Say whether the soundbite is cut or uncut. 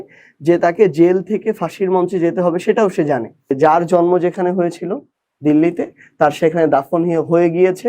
cut